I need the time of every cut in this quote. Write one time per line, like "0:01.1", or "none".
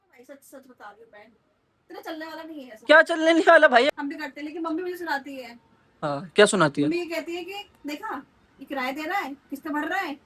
0:03.9